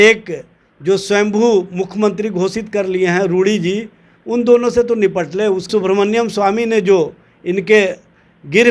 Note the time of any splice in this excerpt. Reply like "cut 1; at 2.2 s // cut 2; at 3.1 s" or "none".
cut 1; at 5.7 s